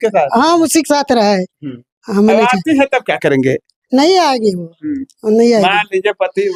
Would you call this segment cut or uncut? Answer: uncut